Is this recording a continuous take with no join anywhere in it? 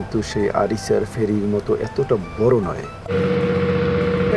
no; 1 cut; at 3.0 s

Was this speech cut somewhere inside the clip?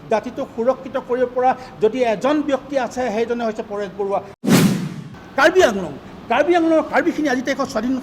yes; 1 cut; at 4.7 s

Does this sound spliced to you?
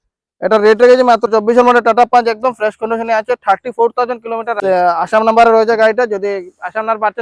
yes; 2 cuts; at 1.3 s, 4.5 s

